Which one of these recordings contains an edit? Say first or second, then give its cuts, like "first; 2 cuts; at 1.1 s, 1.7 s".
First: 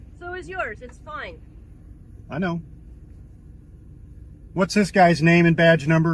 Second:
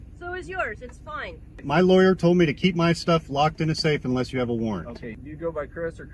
second; 2 cuts; at 1.5 s, 4.9 s